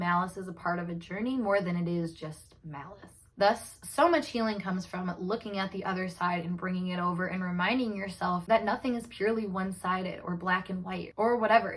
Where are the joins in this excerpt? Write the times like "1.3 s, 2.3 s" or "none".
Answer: none